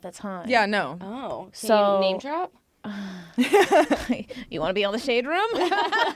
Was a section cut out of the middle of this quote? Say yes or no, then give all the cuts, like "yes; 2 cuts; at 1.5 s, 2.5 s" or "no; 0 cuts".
no; 0 cuts